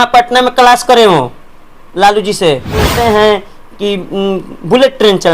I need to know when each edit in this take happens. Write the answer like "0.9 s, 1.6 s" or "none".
2.9 s